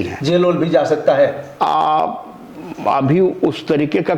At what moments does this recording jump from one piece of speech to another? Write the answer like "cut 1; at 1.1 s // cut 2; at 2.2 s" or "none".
none